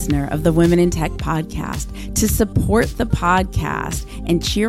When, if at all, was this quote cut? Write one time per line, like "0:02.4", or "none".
none